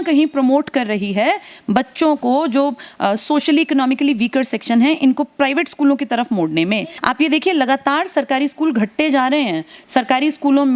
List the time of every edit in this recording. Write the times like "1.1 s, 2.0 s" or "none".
6.9 s